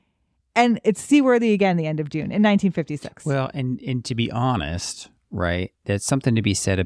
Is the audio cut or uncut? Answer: uncut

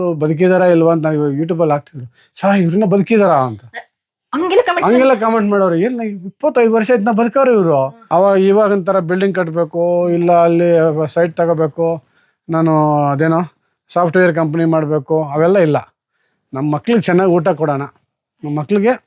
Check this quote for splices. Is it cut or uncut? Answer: cut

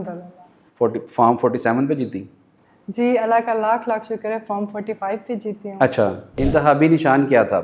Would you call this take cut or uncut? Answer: cut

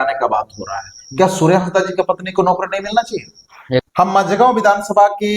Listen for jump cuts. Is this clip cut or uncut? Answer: cut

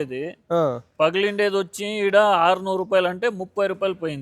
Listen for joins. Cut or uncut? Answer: uncut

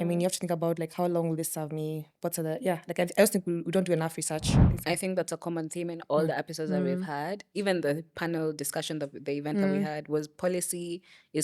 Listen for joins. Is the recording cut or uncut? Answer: cut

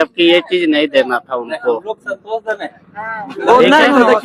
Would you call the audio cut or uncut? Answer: uncut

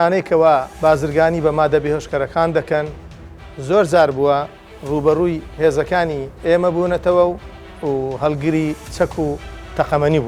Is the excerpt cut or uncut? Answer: cut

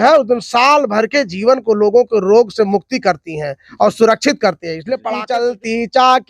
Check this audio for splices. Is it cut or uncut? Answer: cut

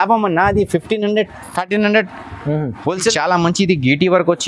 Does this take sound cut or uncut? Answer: cut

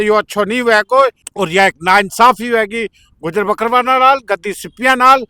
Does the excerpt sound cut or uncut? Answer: cut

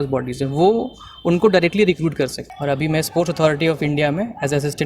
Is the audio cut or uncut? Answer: cut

